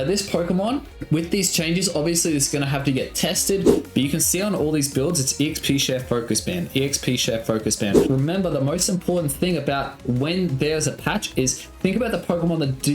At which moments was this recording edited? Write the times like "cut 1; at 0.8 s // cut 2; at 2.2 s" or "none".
cut 1; at 0.9 s // cut 2; at 3.8 s // cut 3; at 8.0 s